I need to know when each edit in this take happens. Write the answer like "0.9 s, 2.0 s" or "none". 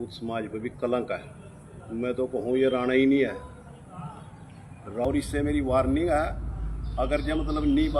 5.0 s